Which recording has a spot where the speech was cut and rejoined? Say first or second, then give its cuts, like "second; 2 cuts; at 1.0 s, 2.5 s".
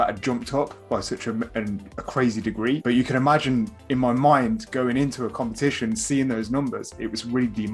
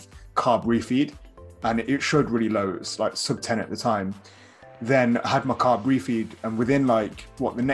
first; 1 cut; at 2.8 s